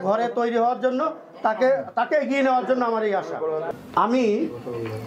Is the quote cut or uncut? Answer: cut